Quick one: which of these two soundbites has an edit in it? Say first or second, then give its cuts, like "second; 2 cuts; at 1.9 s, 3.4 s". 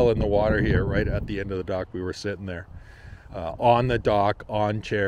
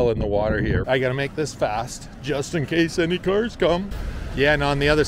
second; 2 cuts; at 0.8 s, 3.9 s